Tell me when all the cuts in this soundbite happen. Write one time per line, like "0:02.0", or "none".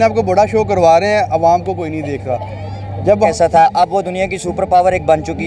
0:03.3